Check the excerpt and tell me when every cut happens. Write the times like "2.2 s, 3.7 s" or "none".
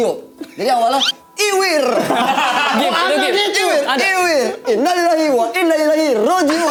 none